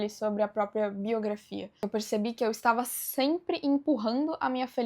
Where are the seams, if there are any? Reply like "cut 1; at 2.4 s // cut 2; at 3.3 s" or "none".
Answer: cut 1; at 1.8 s

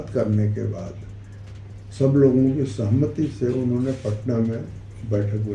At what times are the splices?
none

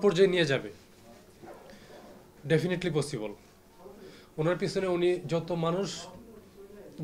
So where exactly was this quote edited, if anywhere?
none

